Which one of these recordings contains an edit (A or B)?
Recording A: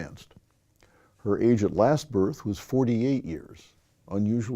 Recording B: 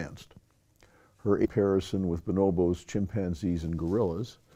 A